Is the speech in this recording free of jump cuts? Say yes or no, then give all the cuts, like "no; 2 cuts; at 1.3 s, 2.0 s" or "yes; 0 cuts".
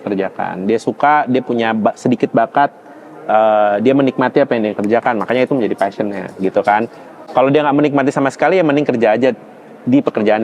no; 1 cut; at 7.1 s